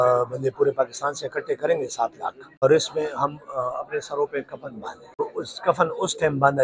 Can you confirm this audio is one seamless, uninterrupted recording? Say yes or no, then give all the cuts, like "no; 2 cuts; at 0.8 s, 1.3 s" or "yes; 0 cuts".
no; 2 cuts; at 2.6 s, 5.2 s